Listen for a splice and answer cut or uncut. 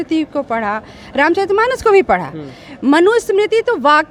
uncut